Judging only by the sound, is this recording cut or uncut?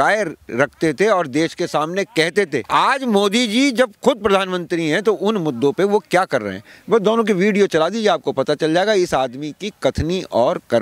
cut